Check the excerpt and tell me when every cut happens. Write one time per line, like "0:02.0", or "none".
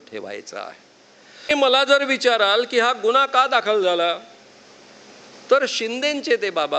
0:01.5